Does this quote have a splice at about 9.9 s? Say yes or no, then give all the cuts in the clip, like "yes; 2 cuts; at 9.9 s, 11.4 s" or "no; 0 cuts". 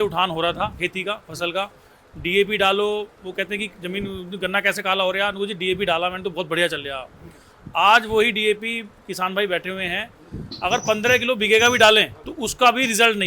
no; 1 cut; at 12.2 s